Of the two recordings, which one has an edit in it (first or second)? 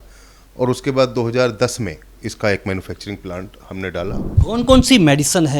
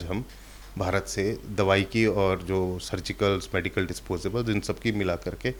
first